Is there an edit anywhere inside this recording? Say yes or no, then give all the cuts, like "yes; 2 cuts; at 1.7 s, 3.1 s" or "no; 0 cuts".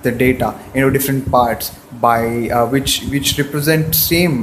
yes; 1 cut; at 1.2 s